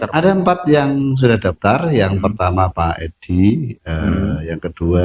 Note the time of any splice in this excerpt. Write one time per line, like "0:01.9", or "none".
none